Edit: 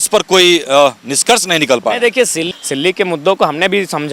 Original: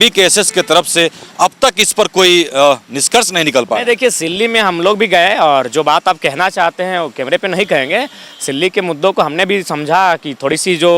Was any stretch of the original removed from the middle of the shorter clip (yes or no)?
yes